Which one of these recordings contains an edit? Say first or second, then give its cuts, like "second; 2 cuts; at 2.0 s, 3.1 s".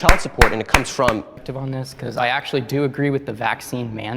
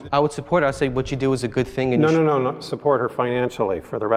first; 1 cut; at 1.4 s